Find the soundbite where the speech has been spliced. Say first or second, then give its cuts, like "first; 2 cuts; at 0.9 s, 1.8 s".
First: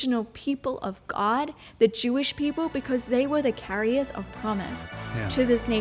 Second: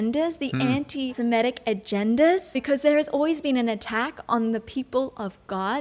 second; 2 cuts; at 1.1 s, 2.6 s